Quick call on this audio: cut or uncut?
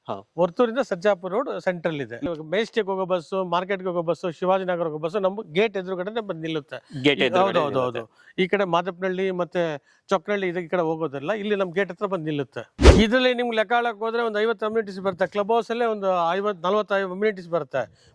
cut